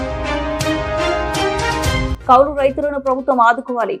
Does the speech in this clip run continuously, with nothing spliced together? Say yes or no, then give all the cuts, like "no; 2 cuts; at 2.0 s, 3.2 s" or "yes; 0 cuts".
no; 1 cut; at 2.1 s